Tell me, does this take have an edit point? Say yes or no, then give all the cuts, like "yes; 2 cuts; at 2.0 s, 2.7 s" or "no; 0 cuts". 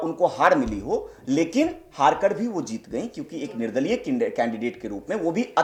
no; 0 cuts